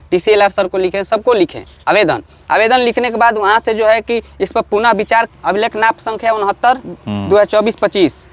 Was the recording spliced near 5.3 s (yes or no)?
yes